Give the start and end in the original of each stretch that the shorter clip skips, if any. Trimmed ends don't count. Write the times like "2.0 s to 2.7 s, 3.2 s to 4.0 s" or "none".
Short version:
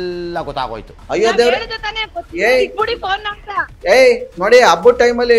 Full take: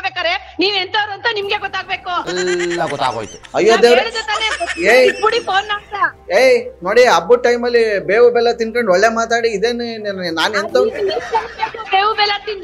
none